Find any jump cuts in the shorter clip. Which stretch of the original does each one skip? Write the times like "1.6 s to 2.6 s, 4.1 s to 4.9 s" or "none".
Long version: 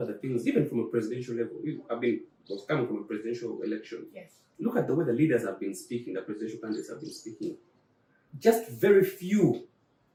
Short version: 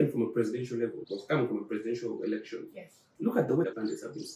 1.6 s to 2.4 s, 5.1 s to 6.5 s